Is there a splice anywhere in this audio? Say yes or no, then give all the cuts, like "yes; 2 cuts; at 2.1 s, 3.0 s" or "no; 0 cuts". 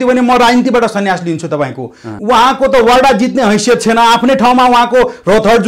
yes; 1 cut; at 2.1 s